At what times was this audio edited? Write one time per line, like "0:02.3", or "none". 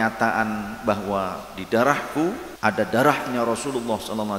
0:02.5